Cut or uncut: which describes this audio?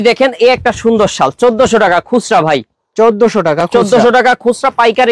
uncut